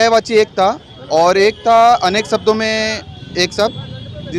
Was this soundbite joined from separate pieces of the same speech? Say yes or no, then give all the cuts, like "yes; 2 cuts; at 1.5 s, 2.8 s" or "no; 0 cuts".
no; 0 cuts